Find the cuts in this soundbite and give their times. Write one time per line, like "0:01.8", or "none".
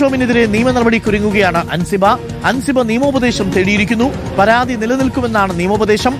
none